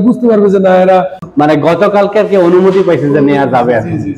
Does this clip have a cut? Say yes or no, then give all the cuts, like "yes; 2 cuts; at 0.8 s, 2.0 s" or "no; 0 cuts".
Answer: yes; 1 cut; at 1.2 s